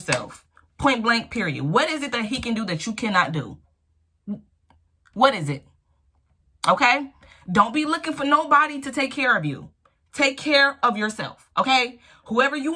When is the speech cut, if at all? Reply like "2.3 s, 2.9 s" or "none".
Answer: none